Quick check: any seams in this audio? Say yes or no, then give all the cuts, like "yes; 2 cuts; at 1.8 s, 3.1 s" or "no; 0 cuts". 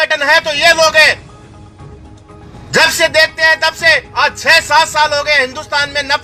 no; 0 cuts